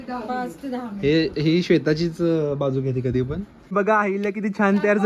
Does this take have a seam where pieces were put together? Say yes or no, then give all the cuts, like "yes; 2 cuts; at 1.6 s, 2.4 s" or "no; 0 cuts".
yes; 1 cut; at 3.5 s